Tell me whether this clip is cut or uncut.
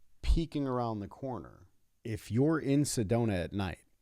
cut